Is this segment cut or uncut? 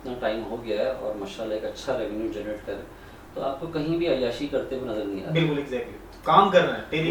uncut